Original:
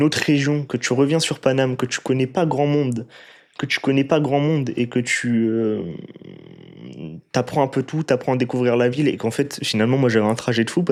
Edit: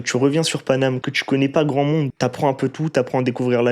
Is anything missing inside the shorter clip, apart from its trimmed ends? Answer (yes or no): yes